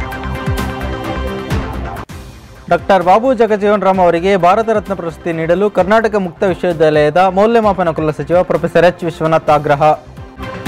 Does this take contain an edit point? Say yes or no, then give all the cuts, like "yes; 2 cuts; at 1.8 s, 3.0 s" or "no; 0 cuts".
yes; 1 cut; at 2.1 s